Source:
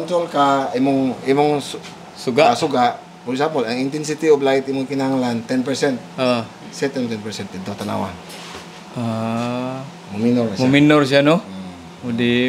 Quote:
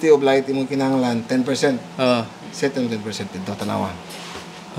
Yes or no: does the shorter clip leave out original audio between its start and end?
no